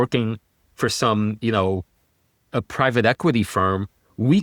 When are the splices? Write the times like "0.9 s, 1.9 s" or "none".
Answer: none